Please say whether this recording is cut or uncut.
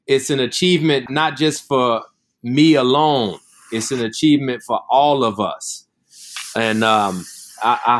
cut